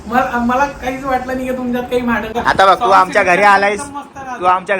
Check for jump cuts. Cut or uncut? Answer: cut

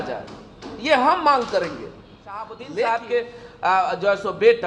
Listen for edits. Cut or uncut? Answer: cut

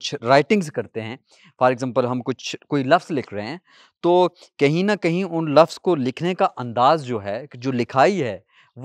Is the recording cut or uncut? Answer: uncut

